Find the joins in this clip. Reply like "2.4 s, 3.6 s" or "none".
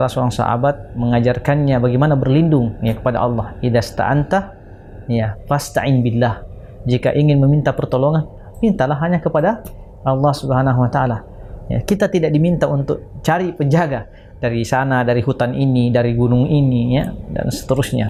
none